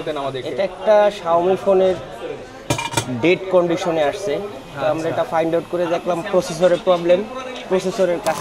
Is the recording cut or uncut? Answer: uncut